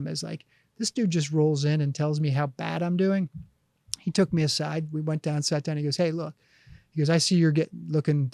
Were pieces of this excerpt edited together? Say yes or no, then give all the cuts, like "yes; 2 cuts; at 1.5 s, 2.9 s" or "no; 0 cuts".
no; 0 cuts